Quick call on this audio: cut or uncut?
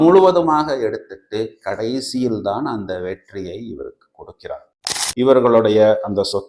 cut